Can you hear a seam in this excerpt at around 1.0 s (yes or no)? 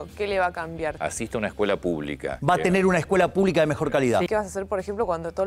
yes